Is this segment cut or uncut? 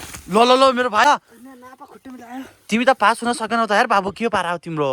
cut